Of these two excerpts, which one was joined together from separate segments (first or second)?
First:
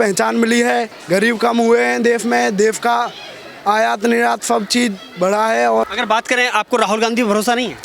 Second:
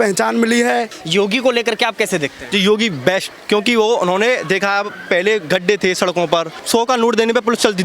second